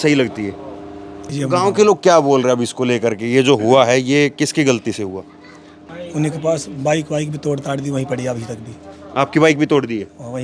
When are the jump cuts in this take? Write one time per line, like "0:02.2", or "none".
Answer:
0:01.3
0:05.9

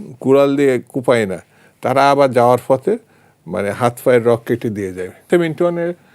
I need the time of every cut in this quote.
0:05.2

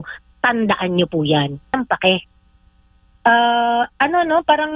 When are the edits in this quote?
0:01.7

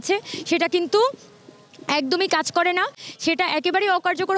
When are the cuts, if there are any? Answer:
none

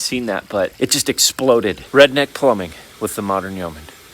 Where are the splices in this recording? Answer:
0:01.8

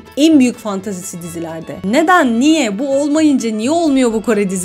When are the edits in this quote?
0:01.7

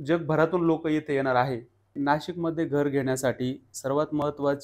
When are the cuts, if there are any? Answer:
0:02.0

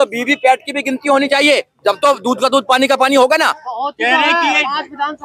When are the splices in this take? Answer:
none

